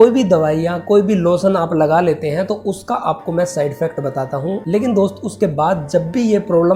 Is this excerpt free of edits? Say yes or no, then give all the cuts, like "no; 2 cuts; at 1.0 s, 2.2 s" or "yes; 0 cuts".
no; 1 cut; at 4.6 s